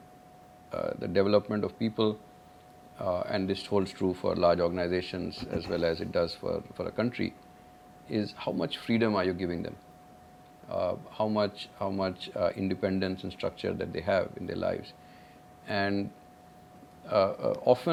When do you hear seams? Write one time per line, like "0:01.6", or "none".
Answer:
none